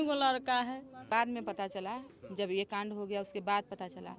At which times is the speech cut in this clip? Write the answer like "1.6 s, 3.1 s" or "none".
1.0 s